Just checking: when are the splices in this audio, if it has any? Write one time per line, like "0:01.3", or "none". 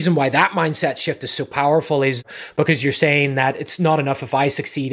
0:02.2